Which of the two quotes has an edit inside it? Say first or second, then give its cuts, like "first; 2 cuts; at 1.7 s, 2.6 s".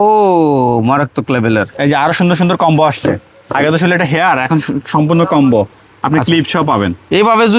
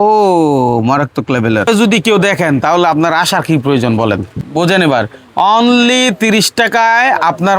second; 2 cuts; at 1.7 s, 4.4 s